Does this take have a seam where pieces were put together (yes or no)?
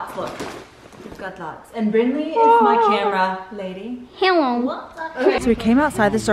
yes